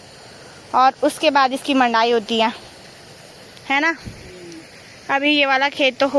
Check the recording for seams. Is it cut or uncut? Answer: uncut